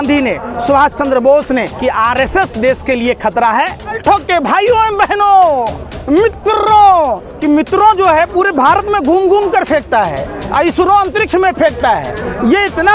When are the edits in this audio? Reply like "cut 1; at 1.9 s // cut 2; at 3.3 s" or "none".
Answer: cut 1; at 1.7 s // cut 2; at 4.0 s // cut 3; at 7.3 s